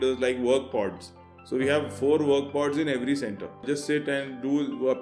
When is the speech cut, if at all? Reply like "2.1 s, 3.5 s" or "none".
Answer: 3.6 s